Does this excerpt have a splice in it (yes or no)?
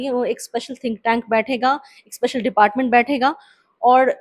no